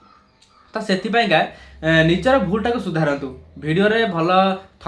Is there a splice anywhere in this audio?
no; 0 cuts

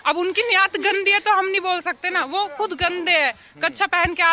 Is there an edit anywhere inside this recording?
no; 0 cuts

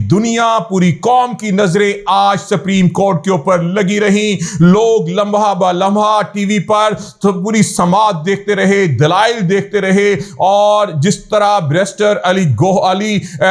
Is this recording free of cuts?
yes; 0 cuts

